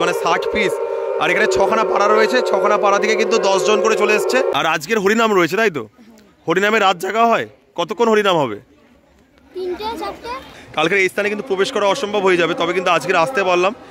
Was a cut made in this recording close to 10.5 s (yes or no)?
yes